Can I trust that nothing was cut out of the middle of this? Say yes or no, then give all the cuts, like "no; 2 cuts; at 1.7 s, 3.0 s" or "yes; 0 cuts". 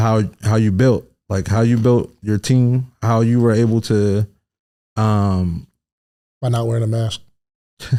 yes; 0 cuts